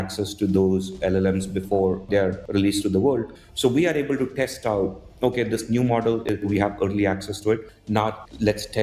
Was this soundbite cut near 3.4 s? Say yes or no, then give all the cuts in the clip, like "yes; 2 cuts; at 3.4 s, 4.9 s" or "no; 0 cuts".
yes; 4 cuts; at 2.2 s, 3.4 s, 6.3 s, 7.9 s